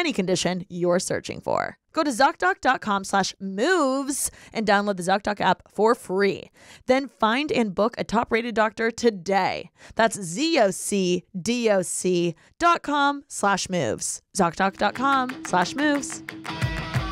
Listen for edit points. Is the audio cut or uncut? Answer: cut